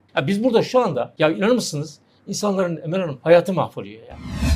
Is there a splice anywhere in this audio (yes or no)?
yes